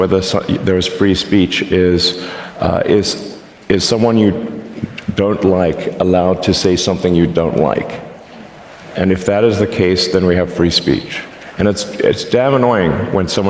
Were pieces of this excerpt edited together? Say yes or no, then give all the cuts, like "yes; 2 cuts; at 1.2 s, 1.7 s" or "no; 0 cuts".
no; 0 cuts